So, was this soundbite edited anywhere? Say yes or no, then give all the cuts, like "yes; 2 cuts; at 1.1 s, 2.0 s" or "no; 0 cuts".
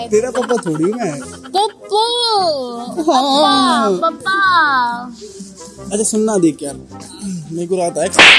no; 0 cuts